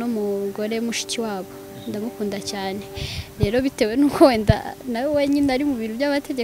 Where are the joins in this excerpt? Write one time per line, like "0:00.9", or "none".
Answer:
none